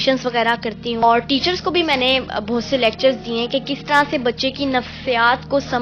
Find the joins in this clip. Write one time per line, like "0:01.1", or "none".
0:01.0